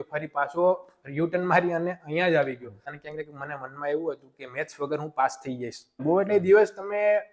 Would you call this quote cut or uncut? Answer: cut